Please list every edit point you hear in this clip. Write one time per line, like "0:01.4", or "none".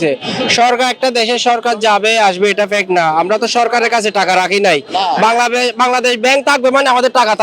none